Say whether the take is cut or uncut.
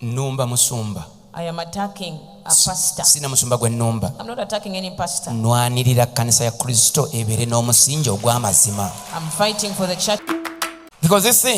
cut